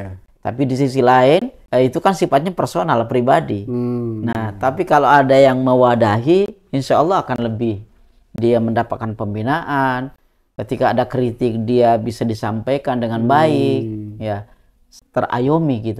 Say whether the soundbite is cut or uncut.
cut